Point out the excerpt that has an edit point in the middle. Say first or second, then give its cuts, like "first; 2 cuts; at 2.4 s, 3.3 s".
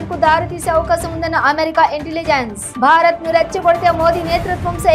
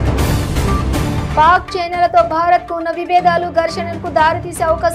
second; 1 cut; at 1.2 s